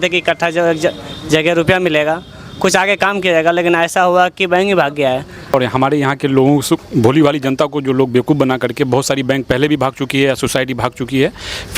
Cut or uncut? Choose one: cut